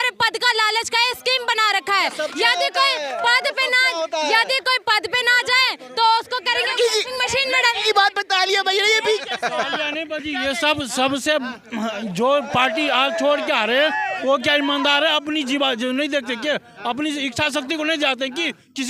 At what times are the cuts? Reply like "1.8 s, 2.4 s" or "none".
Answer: none